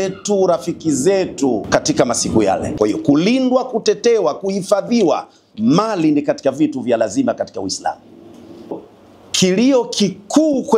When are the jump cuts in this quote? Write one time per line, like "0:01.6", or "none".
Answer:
0:01.6
0:02.7
0:08.9